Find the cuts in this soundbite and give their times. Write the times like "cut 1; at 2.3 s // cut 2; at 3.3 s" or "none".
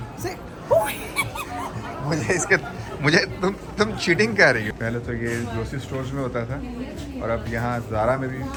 none